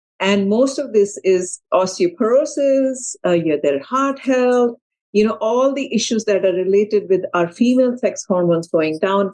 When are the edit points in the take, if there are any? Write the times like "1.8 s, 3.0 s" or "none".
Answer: 1.5 s